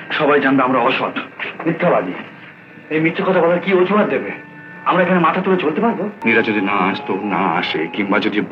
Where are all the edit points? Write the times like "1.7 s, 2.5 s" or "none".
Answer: 6.2 s